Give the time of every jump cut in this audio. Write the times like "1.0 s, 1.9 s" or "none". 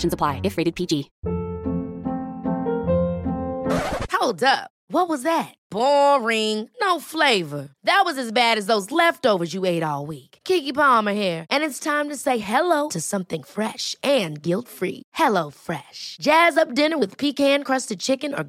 1.2 s